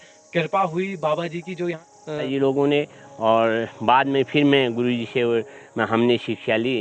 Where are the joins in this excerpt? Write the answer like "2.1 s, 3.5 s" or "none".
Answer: 2.3 s

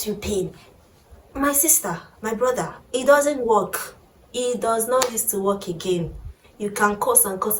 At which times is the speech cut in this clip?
none

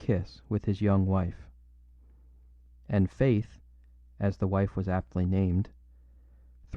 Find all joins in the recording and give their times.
5.3 s

